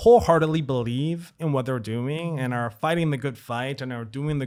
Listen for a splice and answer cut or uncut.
uncut